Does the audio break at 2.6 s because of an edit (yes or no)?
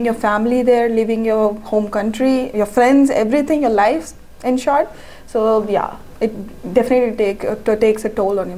no